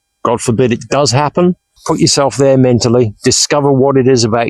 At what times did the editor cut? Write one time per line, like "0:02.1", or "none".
0:01.7